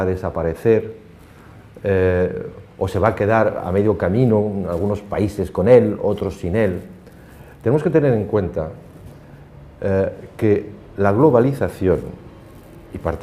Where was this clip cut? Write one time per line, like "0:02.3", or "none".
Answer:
0:07.5